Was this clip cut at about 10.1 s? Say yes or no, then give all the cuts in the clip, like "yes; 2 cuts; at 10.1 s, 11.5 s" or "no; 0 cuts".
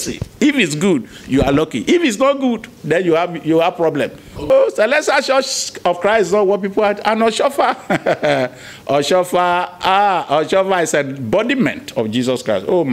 no; 1 cut; at 4.5 s